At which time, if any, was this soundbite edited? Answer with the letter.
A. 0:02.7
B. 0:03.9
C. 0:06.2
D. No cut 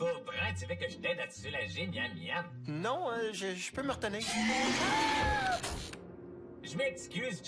A